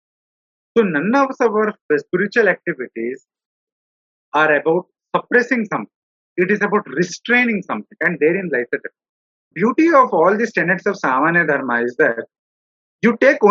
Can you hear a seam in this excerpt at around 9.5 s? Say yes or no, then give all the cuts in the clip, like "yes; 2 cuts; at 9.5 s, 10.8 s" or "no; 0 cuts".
yes; 1 cut; at 9.5 s